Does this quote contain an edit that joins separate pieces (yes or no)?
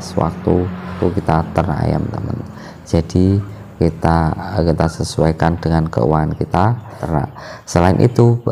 yes